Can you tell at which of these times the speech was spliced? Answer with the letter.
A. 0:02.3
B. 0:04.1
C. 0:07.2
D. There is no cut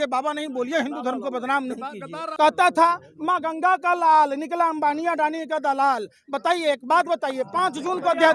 A